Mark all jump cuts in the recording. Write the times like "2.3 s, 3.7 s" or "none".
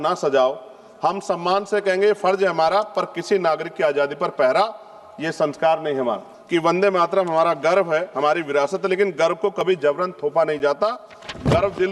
6.3 s